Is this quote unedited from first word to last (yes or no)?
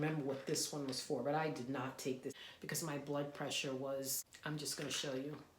no